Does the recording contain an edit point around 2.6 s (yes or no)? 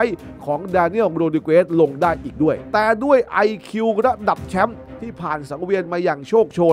yes